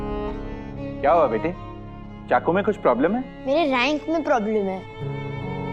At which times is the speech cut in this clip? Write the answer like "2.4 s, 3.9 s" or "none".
3.3 s